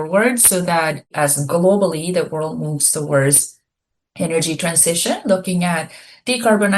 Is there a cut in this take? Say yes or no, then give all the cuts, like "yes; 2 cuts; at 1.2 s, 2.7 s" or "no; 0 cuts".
yes; 1 cut; at 1.1 s